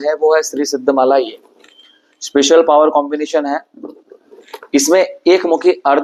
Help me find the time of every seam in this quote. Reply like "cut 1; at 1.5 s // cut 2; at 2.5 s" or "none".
none